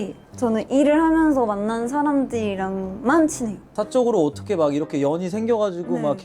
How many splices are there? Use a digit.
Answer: 1